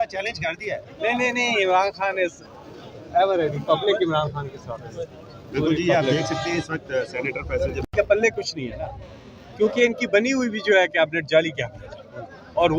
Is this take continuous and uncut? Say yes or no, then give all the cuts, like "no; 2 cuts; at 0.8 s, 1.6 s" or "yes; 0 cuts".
no; 1 cut; at 7.8 s